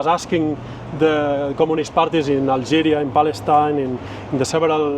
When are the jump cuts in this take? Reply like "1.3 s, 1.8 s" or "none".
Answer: none